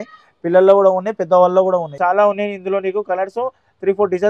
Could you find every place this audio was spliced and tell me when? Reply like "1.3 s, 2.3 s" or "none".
1.9 s